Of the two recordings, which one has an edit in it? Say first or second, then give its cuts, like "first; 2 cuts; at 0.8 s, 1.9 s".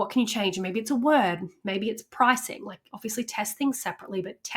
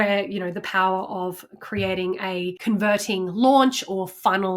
second; 1 cut; at 2.6 s